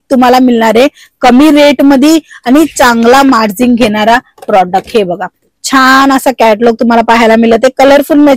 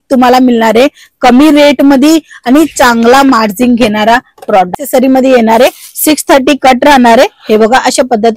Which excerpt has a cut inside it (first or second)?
second